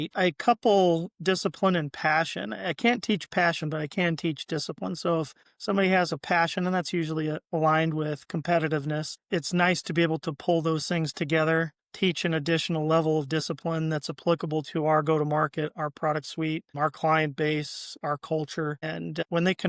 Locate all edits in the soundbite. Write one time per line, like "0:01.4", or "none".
none